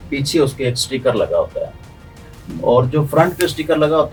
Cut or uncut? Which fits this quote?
uncut